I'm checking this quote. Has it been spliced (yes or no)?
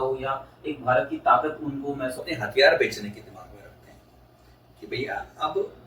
yes